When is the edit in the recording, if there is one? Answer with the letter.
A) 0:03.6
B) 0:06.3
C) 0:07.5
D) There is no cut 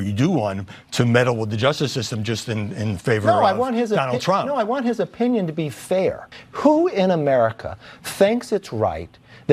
B